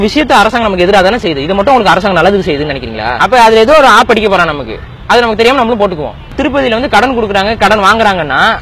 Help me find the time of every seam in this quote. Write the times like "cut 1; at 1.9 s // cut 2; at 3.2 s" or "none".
cut 1; at 3.1 s // cut 2; at 6.4 s